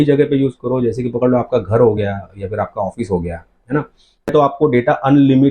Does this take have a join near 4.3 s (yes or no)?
yes